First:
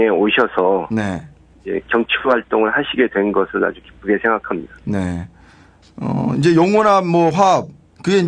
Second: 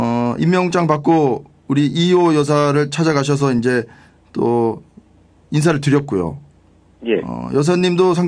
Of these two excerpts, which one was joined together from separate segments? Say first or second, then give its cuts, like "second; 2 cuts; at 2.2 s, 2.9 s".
second; 1 cut; at 4.5 s